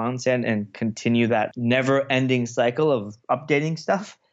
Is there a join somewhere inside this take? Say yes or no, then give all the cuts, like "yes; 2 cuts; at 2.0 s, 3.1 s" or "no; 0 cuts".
yes; 1 cut; at 1.5 s